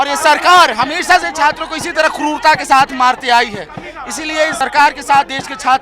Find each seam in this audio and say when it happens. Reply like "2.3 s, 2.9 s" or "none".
4.5 s